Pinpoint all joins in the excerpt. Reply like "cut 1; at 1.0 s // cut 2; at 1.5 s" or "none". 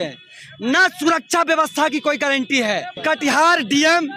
cut 1; at 2.9 s